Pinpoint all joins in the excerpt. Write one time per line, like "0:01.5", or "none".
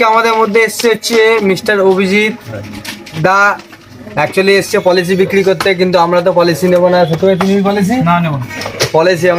none